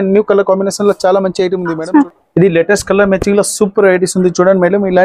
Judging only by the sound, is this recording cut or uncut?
cut